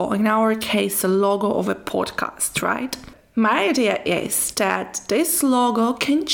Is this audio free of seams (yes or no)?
no